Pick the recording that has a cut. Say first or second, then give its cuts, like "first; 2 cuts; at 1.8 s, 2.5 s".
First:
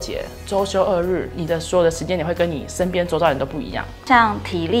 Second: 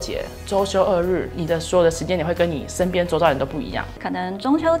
second; 1 cut; at 3.9 s